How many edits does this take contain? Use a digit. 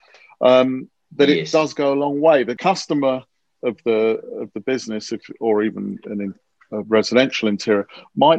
1